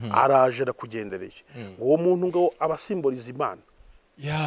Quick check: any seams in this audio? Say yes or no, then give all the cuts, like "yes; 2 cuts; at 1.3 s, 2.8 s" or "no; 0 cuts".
no; 0 cuts